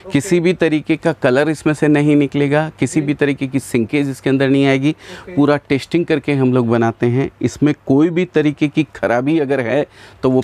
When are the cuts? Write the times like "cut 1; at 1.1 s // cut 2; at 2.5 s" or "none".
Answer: none